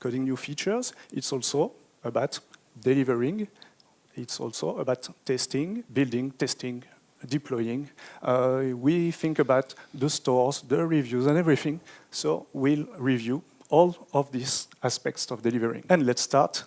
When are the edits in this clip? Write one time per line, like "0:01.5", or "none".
0:05.9
0:15.8